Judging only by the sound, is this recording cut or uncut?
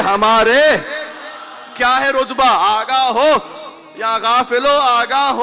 uncut